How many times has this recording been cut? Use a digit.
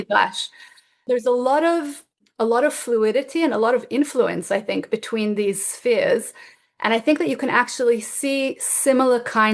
1